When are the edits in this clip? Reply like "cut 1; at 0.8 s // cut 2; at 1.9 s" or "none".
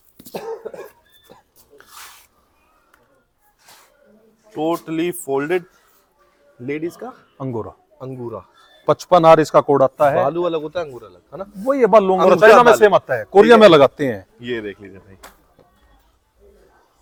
none